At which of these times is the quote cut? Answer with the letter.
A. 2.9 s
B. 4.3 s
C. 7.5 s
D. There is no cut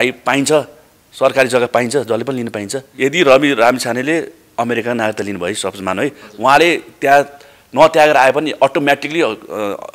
A